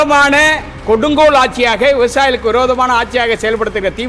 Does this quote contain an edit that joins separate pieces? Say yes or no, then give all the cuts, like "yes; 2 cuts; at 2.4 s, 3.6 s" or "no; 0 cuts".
no; 0 cuts